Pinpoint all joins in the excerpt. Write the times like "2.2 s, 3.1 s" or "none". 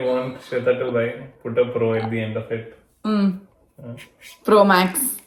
none